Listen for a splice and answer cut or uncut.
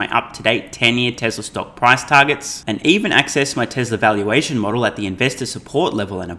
uncut